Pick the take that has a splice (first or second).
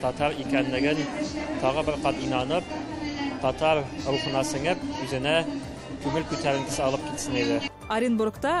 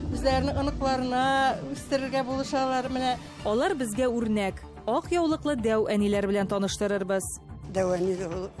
first